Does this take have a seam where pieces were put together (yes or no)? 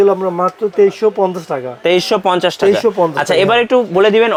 no